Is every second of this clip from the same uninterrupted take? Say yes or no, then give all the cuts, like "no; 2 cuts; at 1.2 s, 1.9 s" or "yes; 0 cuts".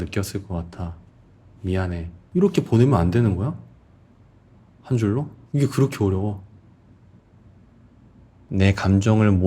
no; 3 cuts; at 2.2 s, 5.4 s, 8.5 s